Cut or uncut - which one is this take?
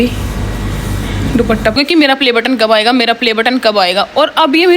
cut